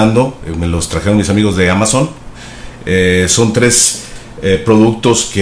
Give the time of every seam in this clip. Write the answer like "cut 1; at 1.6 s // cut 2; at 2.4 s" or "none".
cut 1; at 2.1 s